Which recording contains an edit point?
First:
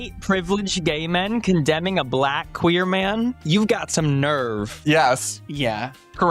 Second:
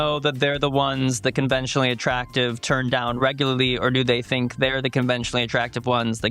first; 1 cut; at 4.7 s

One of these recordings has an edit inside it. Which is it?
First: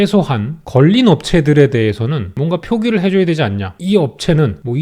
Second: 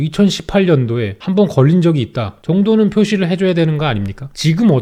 first; 1 cut; at 3.8 s

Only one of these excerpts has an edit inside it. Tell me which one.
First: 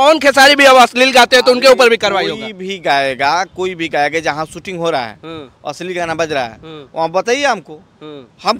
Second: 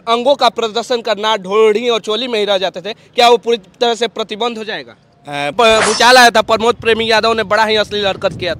second; 1 cut; at 5.5 s

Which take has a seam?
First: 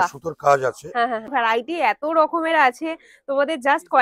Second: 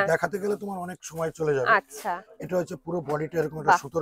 first; 1 cut; at 1.3 s

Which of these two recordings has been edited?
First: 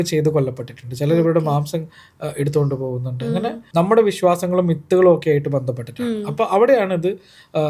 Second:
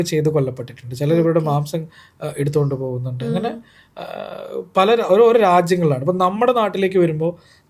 first; 1 cut; at 3.6 s

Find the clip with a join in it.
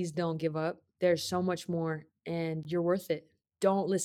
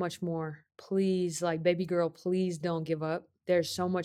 first; 1 cut; at 2.6 s

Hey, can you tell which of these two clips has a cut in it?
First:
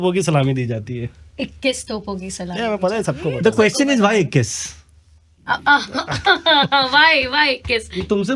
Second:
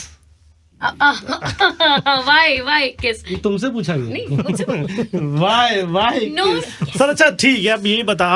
second; 1 cut; at 6.7 s

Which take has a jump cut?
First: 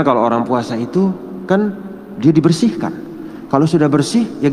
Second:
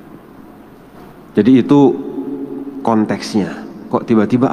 second; 1 cut; at 1.2 s

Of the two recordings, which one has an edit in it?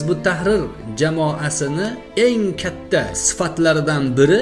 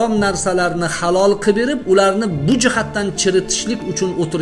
first; 2 cuts; at 2.0 s, 3.1 s

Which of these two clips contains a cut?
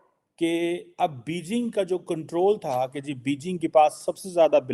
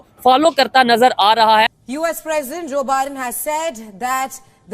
second; 1 cut; at 1.7 s

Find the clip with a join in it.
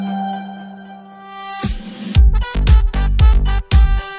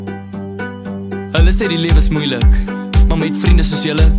second; 1 cut; at 1.3 s

